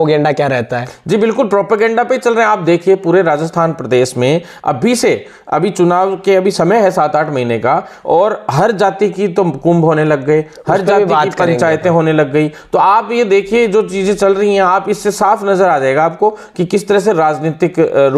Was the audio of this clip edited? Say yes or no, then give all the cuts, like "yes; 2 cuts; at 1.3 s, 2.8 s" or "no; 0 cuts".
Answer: no; 0 cuts